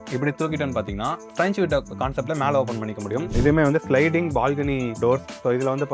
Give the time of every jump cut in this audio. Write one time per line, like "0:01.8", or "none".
0:03.3